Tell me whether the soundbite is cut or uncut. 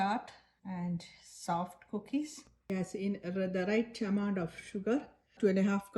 cut